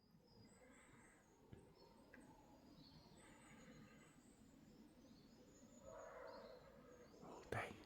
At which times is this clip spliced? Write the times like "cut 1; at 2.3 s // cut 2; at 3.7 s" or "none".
cut 1; at 5.1 s